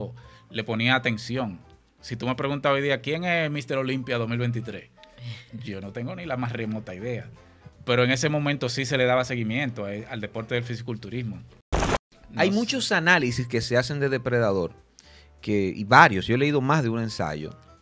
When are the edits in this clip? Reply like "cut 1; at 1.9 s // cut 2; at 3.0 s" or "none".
cut 1; at 11.9 s